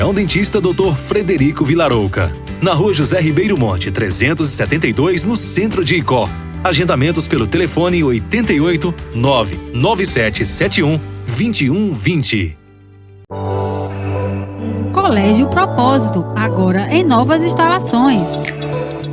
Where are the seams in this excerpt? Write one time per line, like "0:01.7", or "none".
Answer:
0:13.2